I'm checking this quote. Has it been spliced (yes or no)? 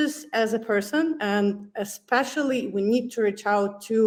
no